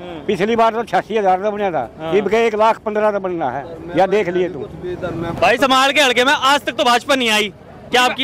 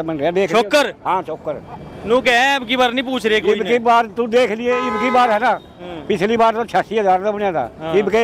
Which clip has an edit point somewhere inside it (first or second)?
first